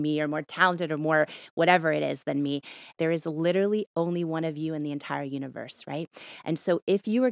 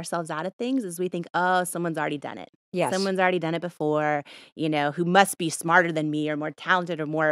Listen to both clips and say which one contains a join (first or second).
first